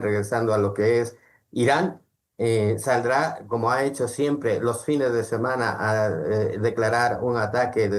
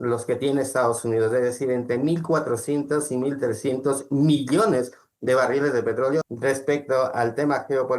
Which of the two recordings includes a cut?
second; 1 cut; at 6.3 s

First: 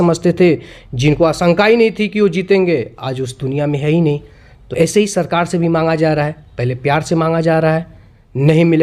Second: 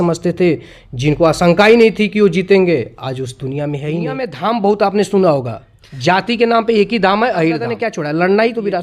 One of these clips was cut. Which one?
second; 2 cuts; at 4.3 s, 7.7 s

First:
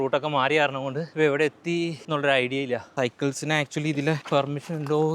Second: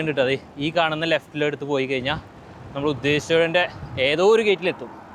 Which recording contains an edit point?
first; 4 cuts; at 1.0 s, 2.0 s, 2.9 s, 4.2 s

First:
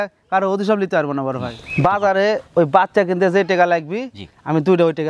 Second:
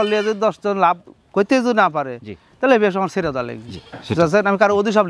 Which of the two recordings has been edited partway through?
first; 1 cut; at 1.6 s

